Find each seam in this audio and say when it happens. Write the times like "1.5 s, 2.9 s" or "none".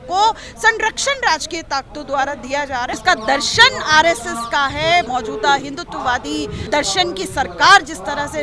2.9 s, 5.1 s, 6.7 s